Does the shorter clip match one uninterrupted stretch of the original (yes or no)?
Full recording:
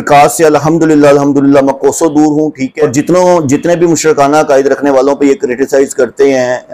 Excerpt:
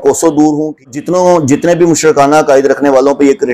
no